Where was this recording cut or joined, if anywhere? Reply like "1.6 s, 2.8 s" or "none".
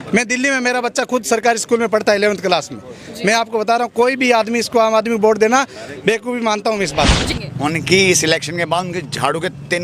7.4 s